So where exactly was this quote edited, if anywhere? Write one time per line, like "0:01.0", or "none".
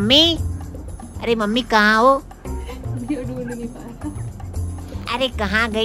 none